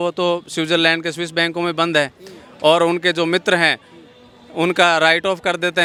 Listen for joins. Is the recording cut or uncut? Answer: uncut